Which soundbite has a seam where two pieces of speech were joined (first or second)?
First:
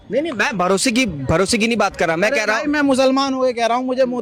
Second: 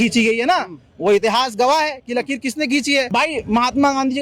second